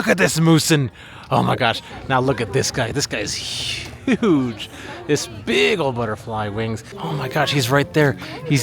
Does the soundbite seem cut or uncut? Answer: cut